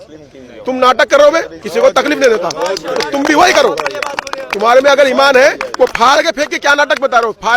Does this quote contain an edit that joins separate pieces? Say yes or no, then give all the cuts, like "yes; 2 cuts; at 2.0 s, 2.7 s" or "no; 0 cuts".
yes; 1 cut; at 1.6 s